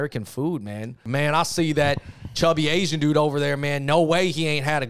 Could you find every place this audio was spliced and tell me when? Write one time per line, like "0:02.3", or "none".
0:01.0